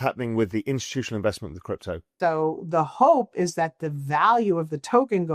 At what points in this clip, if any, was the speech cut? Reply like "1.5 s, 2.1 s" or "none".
2.1 s